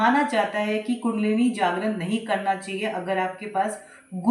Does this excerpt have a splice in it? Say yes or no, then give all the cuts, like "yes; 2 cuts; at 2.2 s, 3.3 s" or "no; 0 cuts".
no; 0 cuts